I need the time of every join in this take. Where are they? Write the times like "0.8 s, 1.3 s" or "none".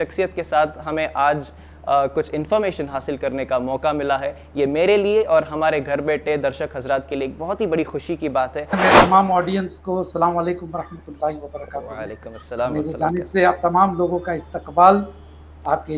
8.8 s